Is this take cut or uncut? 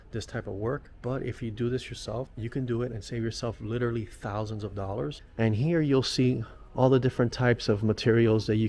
cut